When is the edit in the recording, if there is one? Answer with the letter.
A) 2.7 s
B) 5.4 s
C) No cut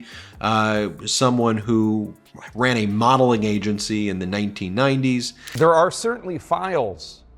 B